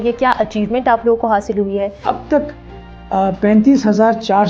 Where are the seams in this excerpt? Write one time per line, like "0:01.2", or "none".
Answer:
0:02.0